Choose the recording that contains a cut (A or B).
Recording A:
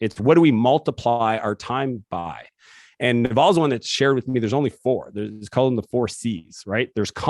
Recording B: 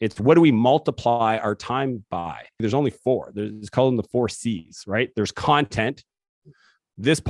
B